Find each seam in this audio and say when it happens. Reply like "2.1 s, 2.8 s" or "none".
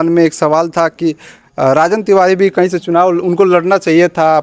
none